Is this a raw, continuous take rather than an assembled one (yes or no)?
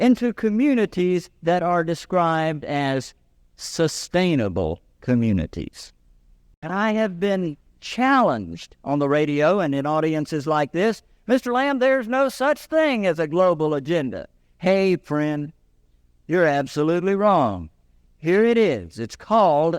no